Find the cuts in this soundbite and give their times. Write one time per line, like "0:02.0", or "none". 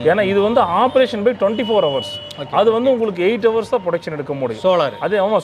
none